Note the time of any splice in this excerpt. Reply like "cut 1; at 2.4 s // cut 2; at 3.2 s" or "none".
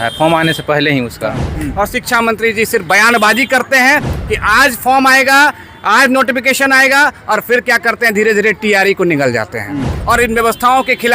cut 1; at 1.6 s // cut 2; at 9.9 s